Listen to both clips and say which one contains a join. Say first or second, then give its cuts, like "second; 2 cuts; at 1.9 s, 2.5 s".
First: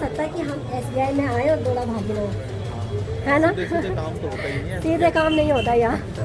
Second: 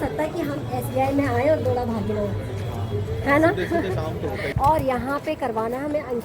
second; 1 cut; at 4.4 s